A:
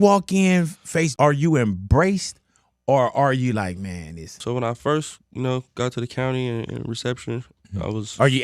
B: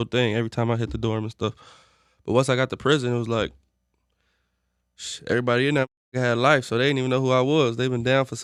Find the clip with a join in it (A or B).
A